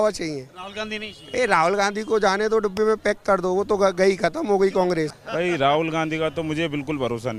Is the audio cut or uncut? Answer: cut